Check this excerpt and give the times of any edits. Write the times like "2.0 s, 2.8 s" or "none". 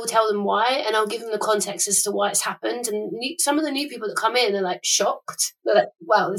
5.5 s